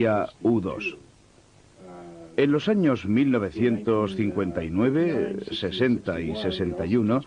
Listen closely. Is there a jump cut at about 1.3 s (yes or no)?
yes